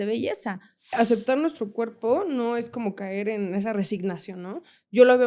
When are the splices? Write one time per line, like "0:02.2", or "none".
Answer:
0:00.9